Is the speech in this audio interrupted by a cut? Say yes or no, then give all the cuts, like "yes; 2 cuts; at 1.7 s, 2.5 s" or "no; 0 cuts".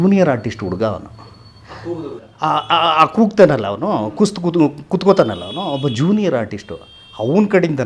no; 0 cuts